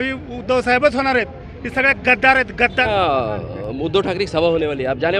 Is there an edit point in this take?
yes; 1 cut; at 2.8 s

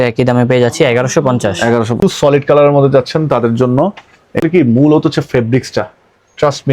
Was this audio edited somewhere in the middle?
yes; 2 cuts; at 1.9 s, 4.4 s

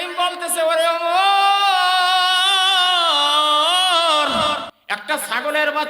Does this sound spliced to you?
yes; 1 cut; at 4.7 s

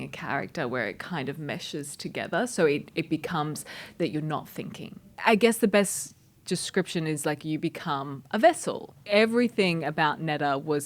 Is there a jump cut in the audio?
yes; 2 cuts; at 5.2 s, 9.0 s

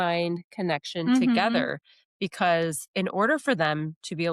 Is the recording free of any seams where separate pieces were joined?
no; 1 cut; at 2.9 s

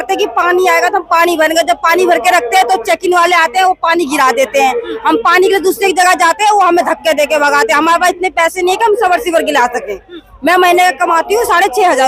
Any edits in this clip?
no; 0 cuts

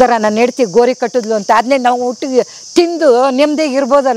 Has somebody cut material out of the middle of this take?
no; 0 cuts

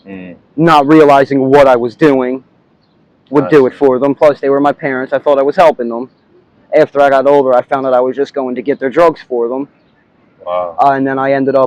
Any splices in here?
no; 0 cuts

